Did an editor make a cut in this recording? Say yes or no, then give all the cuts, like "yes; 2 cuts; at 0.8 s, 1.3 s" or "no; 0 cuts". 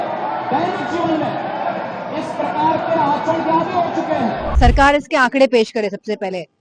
yes; 1 cut; at 4.5 s